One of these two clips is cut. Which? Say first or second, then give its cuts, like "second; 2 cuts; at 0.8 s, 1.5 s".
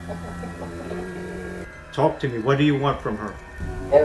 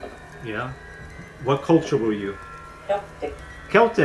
first; 1 cut; at 1.7 s